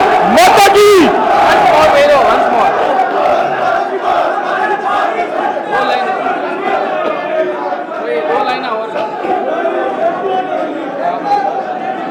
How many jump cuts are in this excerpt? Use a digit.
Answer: 0